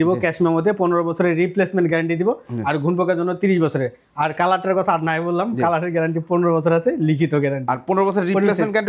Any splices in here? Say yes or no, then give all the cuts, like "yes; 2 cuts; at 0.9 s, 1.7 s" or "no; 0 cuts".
no; 0 cuts